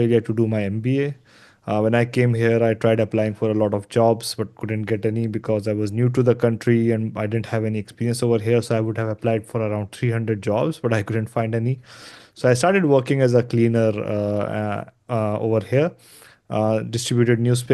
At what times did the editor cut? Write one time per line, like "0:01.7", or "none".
none